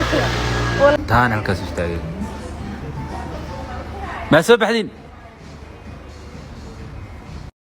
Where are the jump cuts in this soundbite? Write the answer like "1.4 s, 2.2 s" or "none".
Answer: 0.9 s